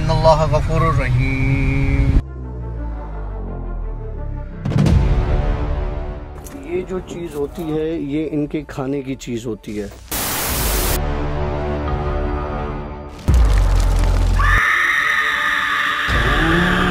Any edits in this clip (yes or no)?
no